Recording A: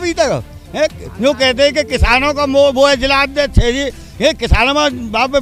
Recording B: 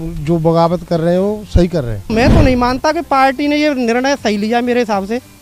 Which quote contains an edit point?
B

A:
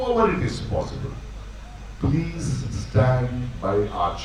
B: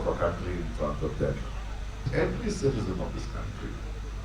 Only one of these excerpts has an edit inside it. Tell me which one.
B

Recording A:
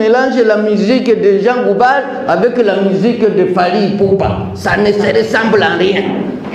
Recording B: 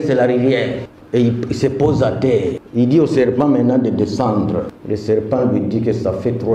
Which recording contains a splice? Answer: B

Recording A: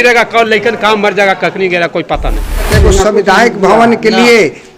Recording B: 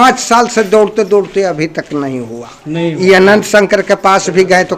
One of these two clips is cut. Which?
A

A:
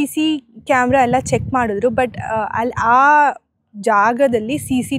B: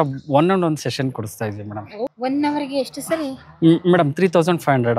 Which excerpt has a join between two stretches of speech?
B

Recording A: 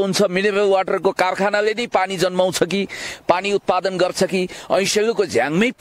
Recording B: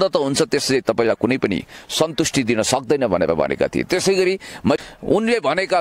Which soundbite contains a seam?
B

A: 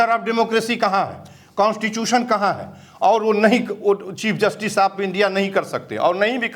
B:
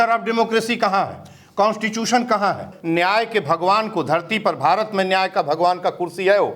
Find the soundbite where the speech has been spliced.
B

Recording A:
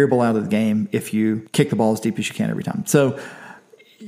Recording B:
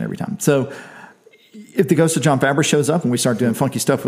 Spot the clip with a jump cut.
A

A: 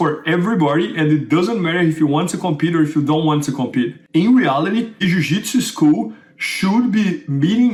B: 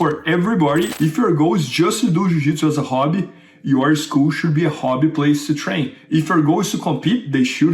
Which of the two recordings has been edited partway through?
B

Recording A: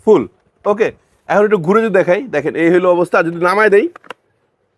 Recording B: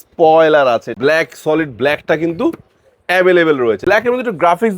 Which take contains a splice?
B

